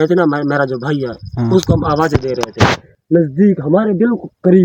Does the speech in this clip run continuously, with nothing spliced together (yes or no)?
no